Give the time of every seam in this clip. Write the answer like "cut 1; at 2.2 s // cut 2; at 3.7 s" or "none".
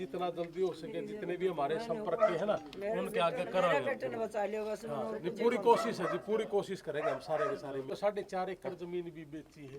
cut 1; at 7.9 s